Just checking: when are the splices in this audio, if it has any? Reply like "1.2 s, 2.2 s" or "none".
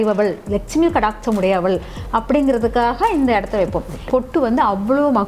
4.0 s